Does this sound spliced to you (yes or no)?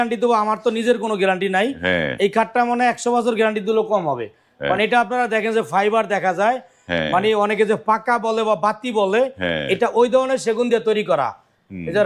no